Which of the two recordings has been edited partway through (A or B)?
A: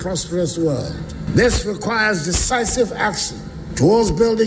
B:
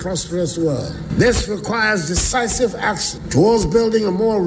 B